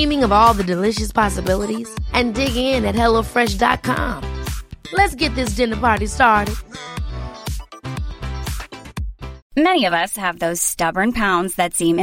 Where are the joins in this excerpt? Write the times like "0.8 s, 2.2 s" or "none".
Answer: 9.4 s